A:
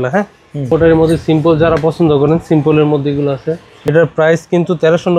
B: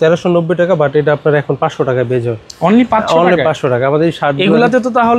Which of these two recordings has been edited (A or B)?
A